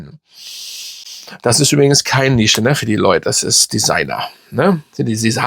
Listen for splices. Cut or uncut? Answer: uncut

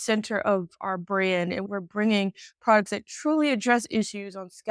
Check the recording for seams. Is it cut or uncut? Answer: cut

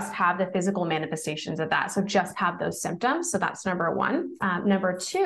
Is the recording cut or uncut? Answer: cut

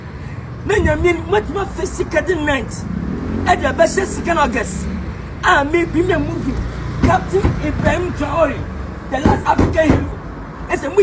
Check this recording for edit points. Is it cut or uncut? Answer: cut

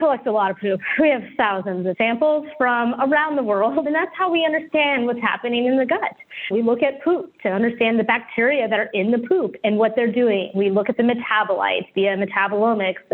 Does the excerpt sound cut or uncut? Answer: cut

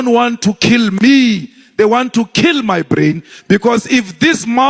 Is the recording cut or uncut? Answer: uncut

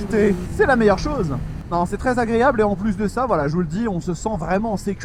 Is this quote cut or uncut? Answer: uncut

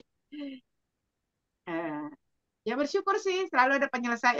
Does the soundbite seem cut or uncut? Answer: uncut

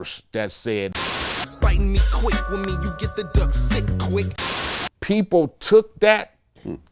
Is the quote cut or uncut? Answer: cut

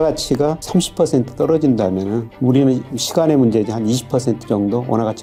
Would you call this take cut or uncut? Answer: uncut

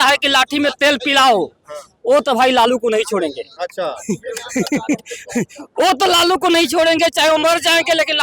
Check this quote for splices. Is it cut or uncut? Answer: uncut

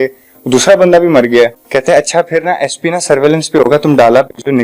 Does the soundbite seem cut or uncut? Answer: uncut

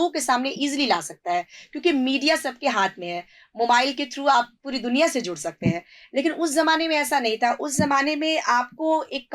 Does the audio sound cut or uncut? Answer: uncut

